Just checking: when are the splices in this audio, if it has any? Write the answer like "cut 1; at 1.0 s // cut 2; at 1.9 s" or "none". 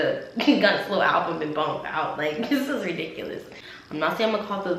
cut 1; at 3.3 s

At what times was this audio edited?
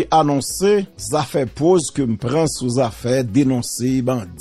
cut 1; at 1.0 s

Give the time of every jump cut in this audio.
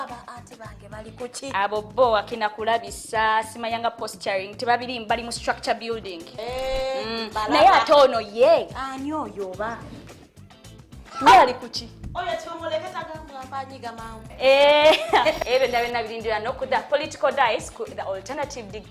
none

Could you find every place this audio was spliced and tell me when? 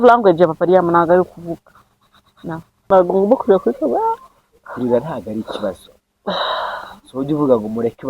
cut 1; at 2.8 s

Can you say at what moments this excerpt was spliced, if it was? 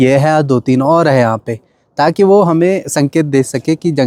none

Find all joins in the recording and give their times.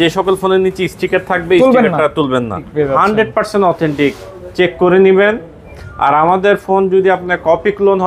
cut 1; at 2.6 s

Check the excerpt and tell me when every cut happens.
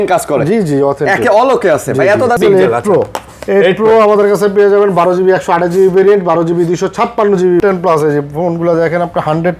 cut 1; at 2.4 s // cut 2; at 7.6 s

